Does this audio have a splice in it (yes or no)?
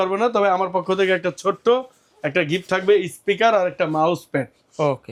no